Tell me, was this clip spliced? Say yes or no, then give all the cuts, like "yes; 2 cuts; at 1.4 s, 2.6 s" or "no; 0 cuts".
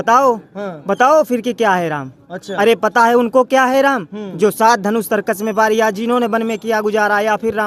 no; 0 cuts